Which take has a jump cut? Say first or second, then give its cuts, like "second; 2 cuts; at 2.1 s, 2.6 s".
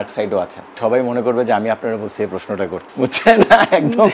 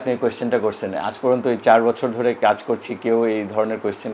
first; 2 cuts; at 0.8 s, 2.8 s